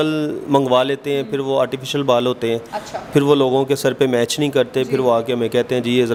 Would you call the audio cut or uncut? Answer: uncut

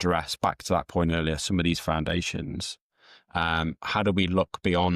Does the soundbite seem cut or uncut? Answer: uncut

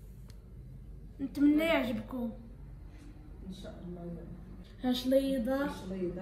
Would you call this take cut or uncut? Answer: cut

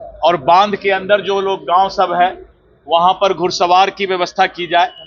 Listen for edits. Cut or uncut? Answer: uncut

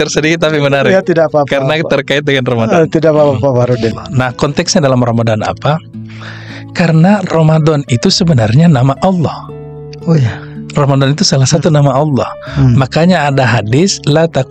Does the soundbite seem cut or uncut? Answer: cut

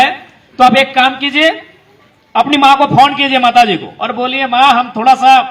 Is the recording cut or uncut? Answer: uncut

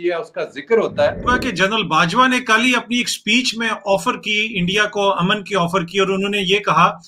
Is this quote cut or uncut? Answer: cut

